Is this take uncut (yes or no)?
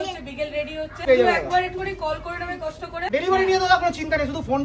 no